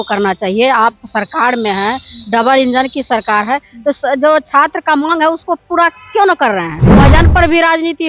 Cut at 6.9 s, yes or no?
yes